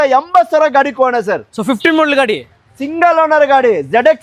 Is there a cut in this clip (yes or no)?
no